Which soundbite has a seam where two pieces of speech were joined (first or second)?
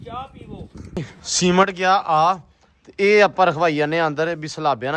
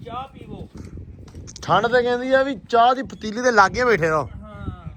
first